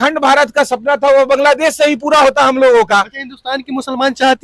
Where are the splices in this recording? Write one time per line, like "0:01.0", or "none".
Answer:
none